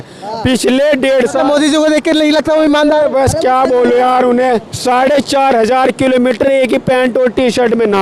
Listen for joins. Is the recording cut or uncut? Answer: cut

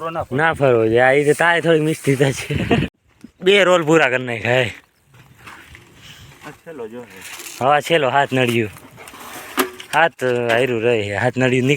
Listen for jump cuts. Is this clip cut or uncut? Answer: cut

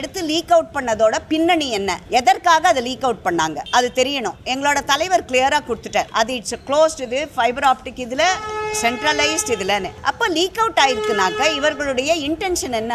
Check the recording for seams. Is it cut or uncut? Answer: cut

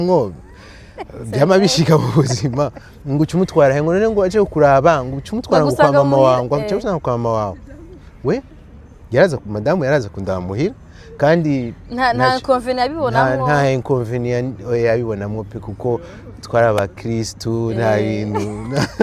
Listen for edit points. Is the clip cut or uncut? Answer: uncut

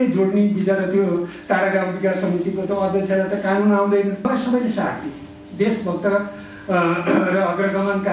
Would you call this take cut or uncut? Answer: cut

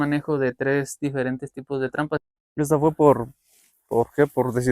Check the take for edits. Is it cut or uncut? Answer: cut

